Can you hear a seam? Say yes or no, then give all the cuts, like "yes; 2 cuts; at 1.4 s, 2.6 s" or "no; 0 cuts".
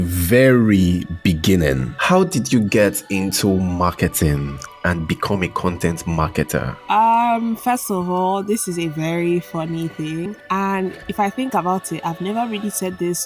yes; 3 cuts; at 1.9 s, 6.7 s, 11.0 s